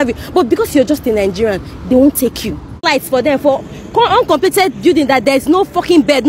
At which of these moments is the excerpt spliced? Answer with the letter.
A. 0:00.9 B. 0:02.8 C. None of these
B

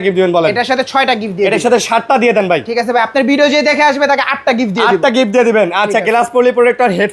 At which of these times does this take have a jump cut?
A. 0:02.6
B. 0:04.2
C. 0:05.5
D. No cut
D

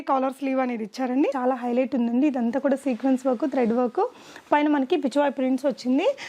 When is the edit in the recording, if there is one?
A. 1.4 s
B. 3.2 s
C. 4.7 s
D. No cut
A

